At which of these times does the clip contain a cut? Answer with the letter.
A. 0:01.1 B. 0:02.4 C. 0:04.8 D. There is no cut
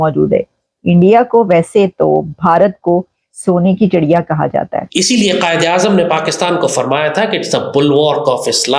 C